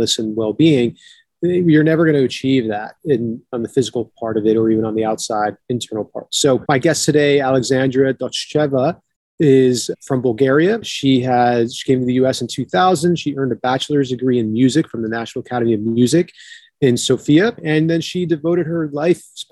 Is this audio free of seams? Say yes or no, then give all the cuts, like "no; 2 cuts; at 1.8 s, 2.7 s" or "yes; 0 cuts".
no; 4 cuts; at 6.6 s, 10.0 s, 10.9 s, 17.6 s